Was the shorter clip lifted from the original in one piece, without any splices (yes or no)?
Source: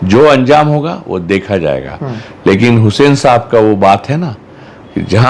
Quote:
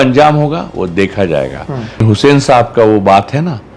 no